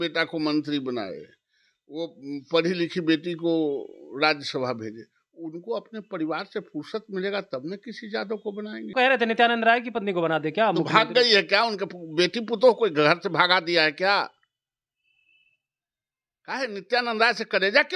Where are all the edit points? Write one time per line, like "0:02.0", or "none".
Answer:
0:08.9